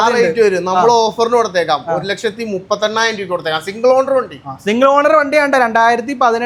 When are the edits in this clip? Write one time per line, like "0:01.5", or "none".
none